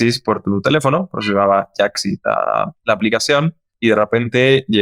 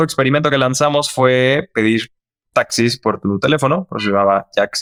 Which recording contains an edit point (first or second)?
first